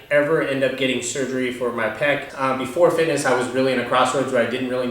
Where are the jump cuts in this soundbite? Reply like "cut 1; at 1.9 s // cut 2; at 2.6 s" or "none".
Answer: cut 1; at 2.3 s